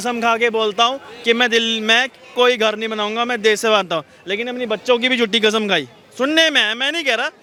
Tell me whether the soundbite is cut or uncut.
uncut